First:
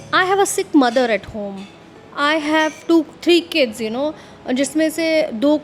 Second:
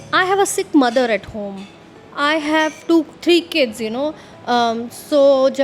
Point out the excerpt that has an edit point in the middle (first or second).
second